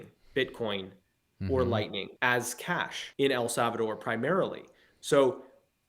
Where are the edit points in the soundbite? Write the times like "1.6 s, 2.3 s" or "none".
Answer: 2.1 s, 3.0 s